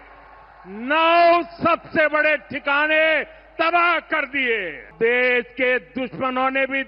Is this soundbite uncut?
no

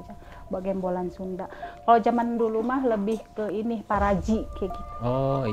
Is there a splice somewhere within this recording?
no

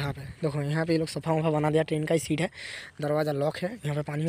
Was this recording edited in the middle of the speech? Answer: no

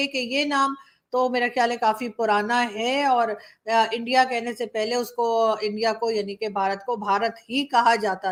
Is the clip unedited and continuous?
yes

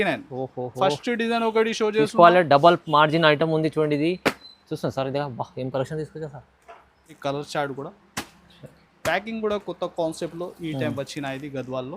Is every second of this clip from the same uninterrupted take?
no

